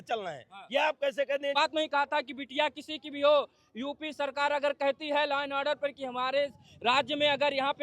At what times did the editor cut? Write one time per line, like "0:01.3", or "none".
0:01.6